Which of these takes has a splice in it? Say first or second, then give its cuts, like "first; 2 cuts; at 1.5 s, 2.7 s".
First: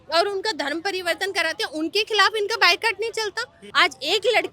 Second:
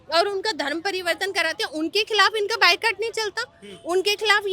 first; 1 cut; at 3.6 s